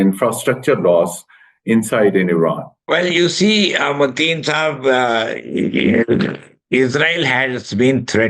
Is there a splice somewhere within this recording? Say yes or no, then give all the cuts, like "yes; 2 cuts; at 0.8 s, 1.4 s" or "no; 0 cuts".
no; 0 cuts